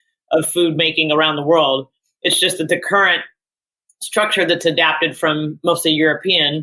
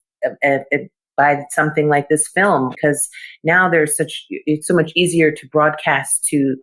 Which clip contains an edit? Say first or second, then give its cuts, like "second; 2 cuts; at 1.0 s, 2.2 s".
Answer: second; 1 cut; at 2.7 s